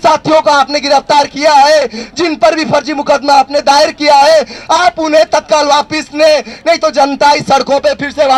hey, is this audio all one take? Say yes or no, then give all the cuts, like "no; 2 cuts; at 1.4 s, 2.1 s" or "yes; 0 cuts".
yes; 0 cuts